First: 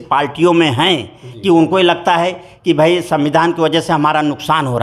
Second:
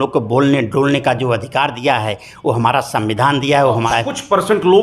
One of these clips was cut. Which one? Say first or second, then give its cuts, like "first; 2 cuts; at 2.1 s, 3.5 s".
second; 1 cut; at 3.9 s